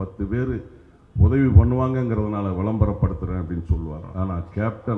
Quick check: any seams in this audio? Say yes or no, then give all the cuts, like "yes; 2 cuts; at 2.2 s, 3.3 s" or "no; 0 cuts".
yes; 1 cut; at 4.0 s